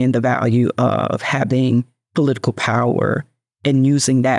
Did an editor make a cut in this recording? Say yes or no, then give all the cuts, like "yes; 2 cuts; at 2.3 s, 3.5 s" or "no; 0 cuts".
no; 0 cuts